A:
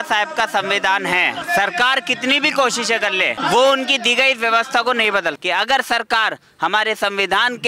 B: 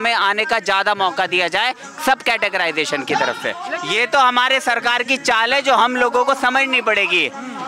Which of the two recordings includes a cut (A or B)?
A